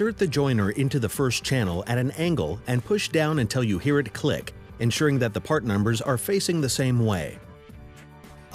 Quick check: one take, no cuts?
yes; 0 cuts

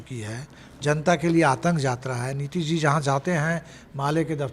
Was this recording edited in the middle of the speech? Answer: no; 0 cuts

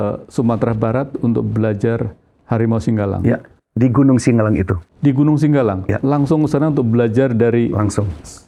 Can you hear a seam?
no; 0 cuts

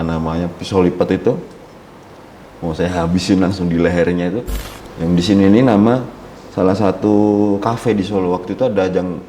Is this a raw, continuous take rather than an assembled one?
no; 1 cut; at 4.6 s

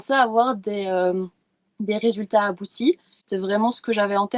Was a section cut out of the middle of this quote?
yes; 1 cut; at 3.3 s

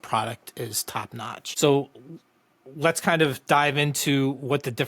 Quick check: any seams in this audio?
yes; 1 cut; at 1.4 s

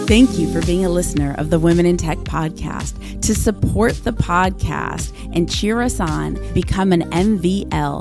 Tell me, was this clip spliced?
no; 0 cuts

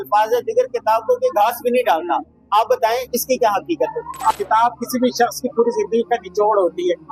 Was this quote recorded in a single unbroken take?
no; 2 cuts; at 3.1 s, 4.3 s

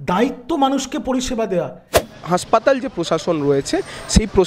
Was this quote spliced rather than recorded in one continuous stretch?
yes; 1 cut; at 2.0 s

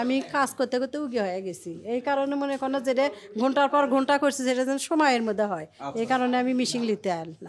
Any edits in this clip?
no; 0 cuts

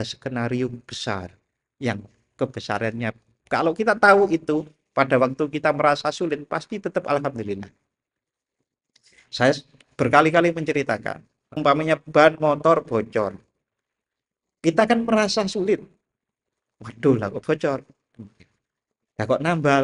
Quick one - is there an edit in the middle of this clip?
yes; 1 cut; at 11.5 s

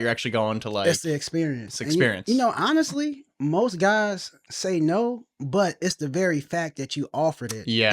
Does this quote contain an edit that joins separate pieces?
no; 0 cuts

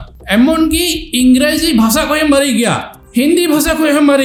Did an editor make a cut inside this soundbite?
no; 0 cuts

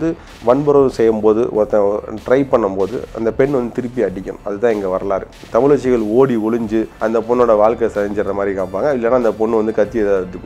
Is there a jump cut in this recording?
yes; 2 cuts; at 5.4 s, 6.9 s

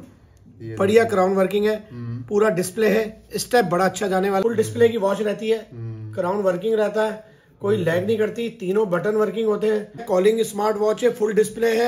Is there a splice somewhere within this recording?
yes; 2 cuts; at 4.4 s, 10.0 s

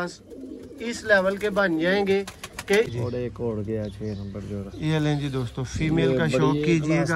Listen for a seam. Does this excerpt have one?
yes; 1 cut; at 2.9 s

